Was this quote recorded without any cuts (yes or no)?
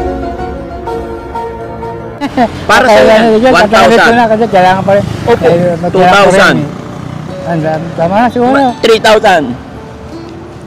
yes